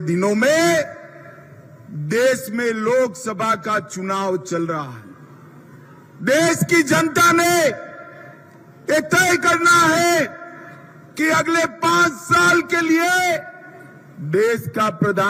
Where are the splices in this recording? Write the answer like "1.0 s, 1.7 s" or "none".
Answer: none